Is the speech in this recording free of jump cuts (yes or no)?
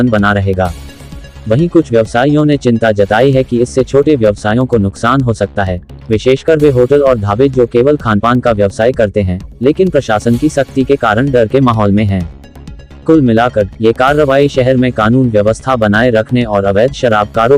yes